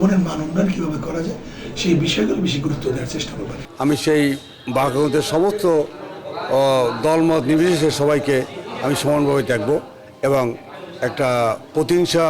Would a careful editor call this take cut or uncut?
uncut